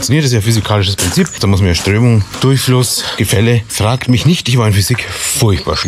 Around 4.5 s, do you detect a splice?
no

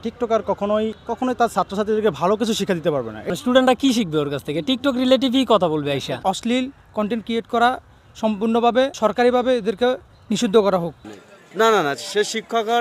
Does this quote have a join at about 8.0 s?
no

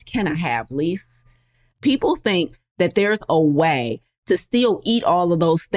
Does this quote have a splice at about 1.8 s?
yes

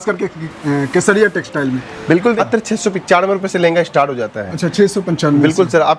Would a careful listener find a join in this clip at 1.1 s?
no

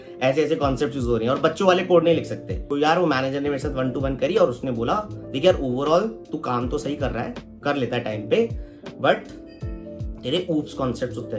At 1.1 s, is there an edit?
no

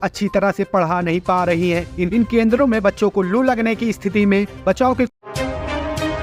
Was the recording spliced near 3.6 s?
no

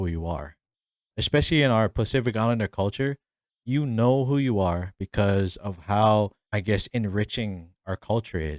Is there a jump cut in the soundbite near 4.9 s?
no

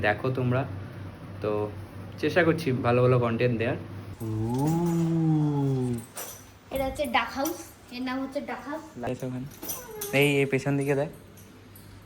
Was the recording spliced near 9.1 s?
yes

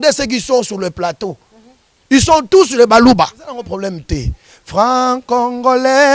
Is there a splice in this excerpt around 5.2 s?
no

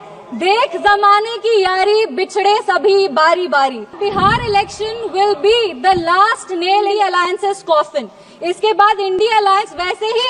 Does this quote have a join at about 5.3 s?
no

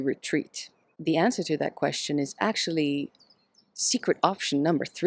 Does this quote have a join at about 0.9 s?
yes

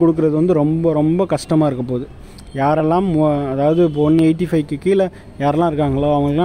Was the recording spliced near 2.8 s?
no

